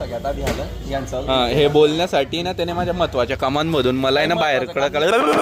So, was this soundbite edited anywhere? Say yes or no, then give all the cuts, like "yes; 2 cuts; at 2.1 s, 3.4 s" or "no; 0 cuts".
no; 0 cuts